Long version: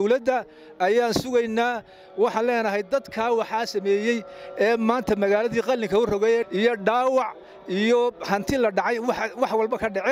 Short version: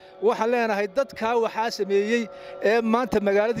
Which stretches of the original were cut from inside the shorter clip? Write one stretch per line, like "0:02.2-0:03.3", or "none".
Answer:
none